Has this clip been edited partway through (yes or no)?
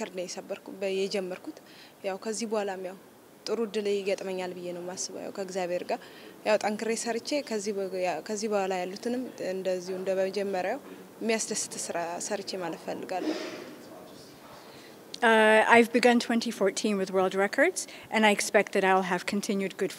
yes